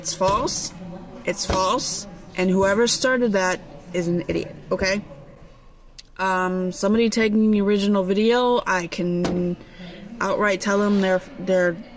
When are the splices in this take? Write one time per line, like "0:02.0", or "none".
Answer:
none